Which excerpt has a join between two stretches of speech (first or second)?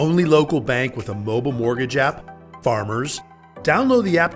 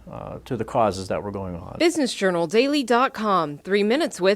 second